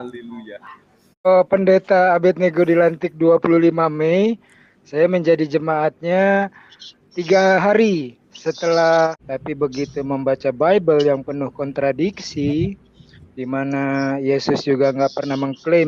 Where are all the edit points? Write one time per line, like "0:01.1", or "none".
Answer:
0:01.3
0:09.1